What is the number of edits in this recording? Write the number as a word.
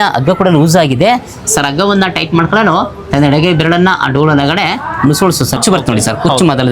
one